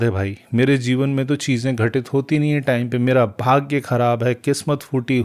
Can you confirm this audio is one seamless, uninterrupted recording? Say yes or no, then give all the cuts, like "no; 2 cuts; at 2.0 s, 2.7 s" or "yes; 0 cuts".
yes; 0 cuts